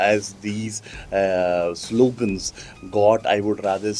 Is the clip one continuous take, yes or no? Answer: yes